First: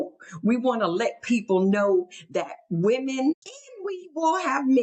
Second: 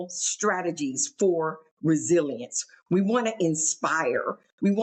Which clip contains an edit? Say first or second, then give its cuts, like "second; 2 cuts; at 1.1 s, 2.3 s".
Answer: first; 1 cut; at 3.3 s